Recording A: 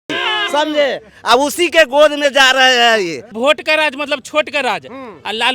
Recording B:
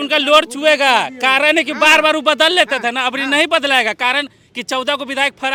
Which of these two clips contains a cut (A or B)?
A